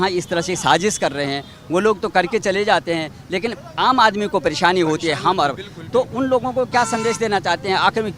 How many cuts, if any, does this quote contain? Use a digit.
0